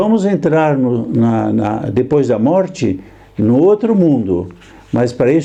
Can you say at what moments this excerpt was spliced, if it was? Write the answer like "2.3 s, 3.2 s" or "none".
none